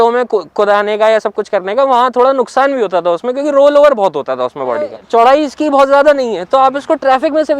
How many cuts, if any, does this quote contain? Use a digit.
1